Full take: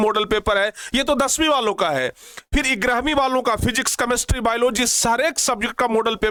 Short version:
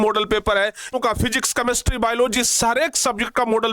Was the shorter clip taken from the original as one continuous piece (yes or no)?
no